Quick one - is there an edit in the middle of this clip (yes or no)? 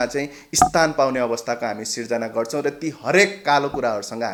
no